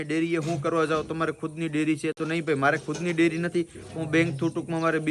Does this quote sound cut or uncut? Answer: uncut